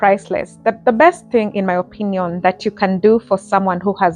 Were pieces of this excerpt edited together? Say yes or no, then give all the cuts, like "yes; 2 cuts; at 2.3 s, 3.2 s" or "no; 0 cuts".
yes; 1 cut; at 1.2 s